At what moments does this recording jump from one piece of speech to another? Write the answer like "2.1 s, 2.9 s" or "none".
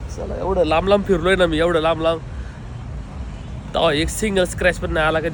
none